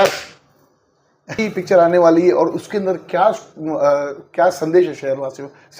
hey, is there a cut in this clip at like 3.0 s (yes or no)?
no